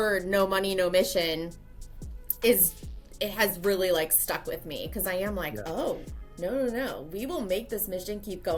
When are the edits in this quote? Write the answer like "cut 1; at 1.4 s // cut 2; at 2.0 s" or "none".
none

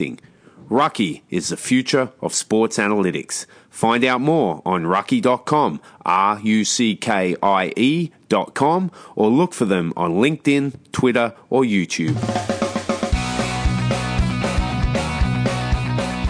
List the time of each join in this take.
cut 1; at 12.2 s

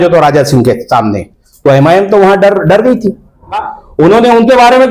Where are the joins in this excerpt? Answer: cut 1; at 3.7 s

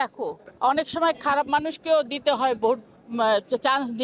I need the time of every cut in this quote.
none

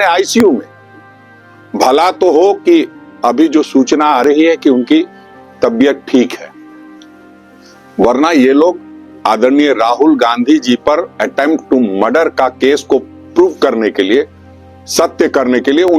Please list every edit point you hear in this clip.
none

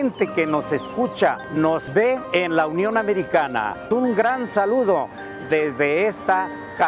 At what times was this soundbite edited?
cut 1; at 1.8 s // cut 2; at 3.8 s

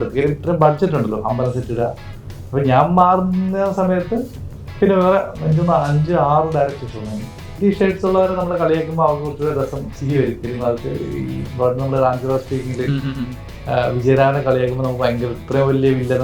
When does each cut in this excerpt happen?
cut 1; at 7.6 s

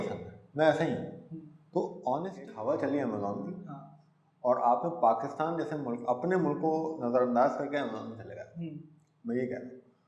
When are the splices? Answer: cut 1; at 2.3 s

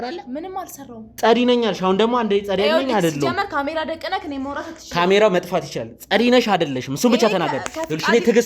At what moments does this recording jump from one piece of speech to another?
none

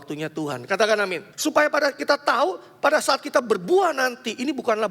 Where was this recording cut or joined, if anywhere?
cut 1; at 1.2 s

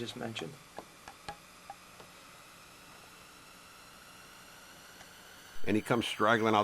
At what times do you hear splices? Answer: cut 1; at 5.5 s

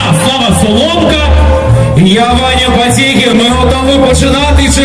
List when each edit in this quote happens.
none

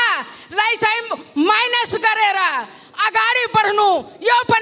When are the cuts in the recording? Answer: none

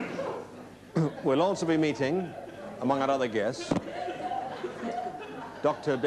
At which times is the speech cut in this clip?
cut 1; at 1.1 s

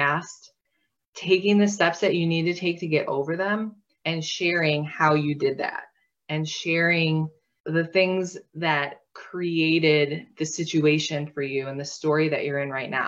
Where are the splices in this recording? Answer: none

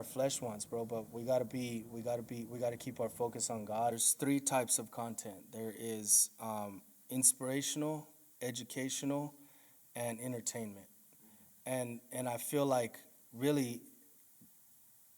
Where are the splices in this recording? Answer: cut 1; at 3.9 s

